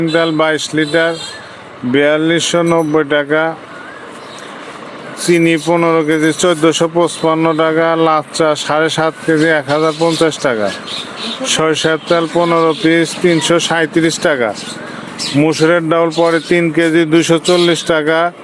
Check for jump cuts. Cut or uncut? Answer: uncut